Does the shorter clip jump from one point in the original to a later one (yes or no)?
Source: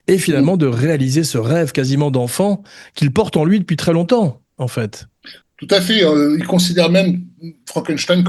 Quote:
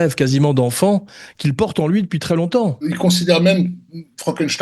yes